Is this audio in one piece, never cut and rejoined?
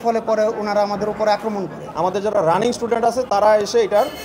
no; 1 cut; at 1.9 s

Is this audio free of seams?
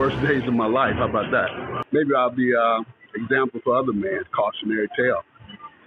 no; 1 cut; at 1.7 s

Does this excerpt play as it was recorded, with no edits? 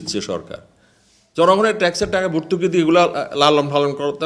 yes; 0 cuts

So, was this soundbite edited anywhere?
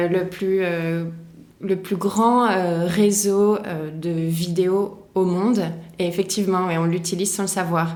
no; 0 cuts

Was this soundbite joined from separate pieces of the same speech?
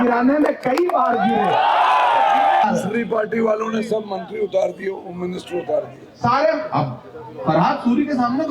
yes; 1 cut; at 2.6 s

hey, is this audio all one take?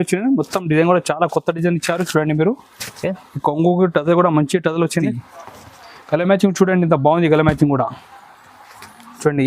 no; 1 cut; at 5.1 s

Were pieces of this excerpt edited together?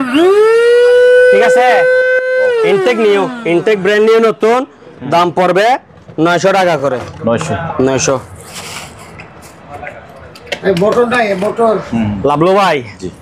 no; 0 cuts

